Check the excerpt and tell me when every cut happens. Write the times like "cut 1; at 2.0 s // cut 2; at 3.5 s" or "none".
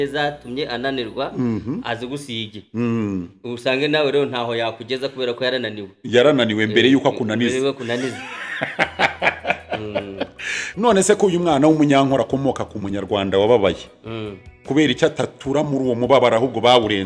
cut 1; at 10.6 s